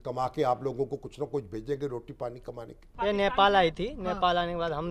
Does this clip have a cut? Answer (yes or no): yes